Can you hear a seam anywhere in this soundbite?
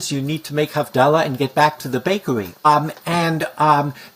yes; 1 cut; at 2.6 s

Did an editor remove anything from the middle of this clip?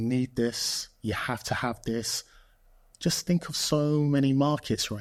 no; 0 cuts

